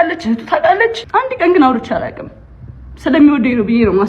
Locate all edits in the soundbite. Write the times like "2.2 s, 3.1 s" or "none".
1.0 s